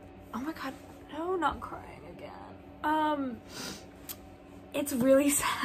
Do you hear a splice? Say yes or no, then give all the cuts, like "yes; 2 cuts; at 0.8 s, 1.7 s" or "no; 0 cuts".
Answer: no; 0 cuts